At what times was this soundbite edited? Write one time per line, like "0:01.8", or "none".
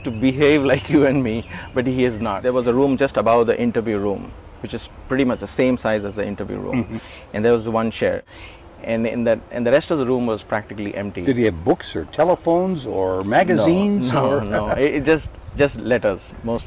0:02.4
0:08.2